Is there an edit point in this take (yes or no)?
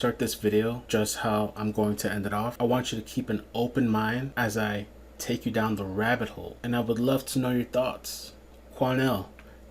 yes